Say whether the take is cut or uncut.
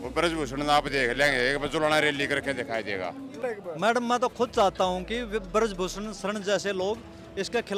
cut